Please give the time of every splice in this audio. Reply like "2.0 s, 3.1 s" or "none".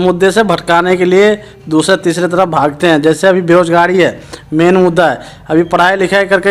none